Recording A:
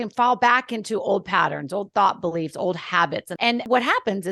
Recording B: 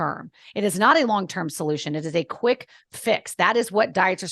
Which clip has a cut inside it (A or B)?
A